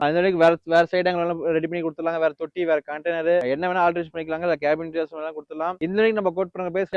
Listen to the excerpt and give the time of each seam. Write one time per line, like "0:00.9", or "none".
none